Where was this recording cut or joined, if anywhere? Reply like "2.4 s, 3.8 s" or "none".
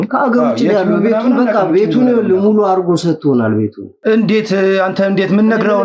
3.8 s